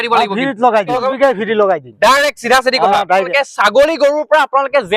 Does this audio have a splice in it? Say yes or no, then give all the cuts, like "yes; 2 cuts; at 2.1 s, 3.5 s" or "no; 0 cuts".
yes; 2 cuts; at 1.0 s, 3.3 s